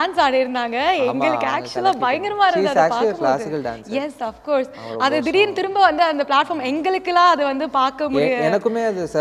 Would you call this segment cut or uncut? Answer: uncut